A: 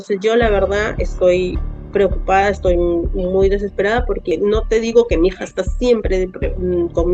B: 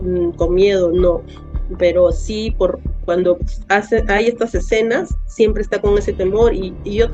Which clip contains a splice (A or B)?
A